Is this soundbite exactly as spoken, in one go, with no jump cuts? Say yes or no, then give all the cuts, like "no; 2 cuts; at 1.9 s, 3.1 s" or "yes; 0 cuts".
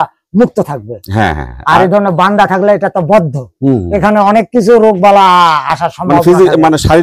yes; 0 cuts